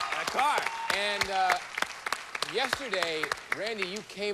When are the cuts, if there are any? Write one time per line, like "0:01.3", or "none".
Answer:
none